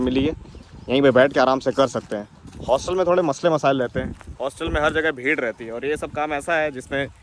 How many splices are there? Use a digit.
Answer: 0